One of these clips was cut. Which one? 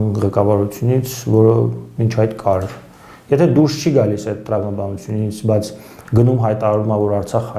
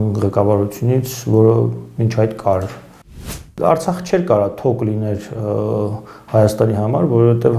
second; 1 cut; at 3.3 s

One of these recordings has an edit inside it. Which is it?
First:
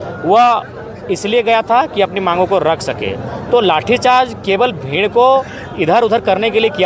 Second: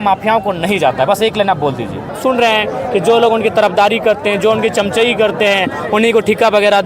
second; 1 cut; at 2.1 s

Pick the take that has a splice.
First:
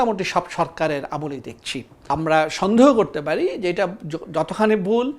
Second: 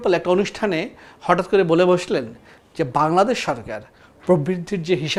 first; 1 cut; at 2.1 s

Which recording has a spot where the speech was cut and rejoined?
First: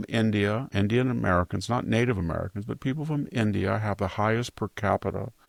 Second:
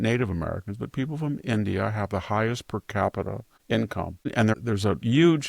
second; 1 cut; at 4.5 s

